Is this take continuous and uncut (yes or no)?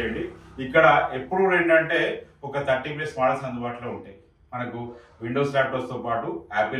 yes